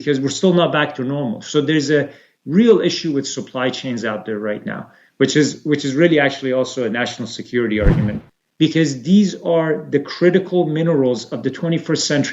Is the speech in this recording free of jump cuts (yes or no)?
no